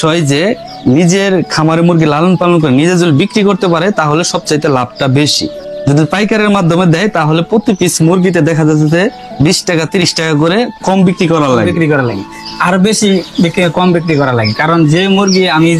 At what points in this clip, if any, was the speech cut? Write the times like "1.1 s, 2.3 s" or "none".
none